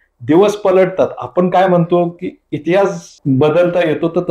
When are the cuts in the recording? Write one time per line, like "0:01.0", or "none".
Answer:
0:03.1